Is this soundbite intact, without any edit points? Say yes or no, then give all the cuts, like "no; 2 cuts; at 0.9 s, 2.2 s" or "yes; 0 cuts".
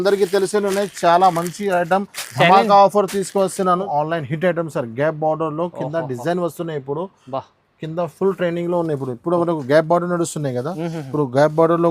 no; 1 cut; at 3.9 s